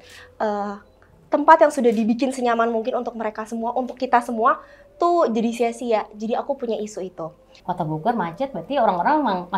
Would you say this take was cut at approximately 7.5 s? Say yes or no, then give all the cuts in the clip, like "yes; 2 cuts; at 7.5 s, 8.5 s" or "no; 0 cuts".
yes; 1 cut; at 7.5 s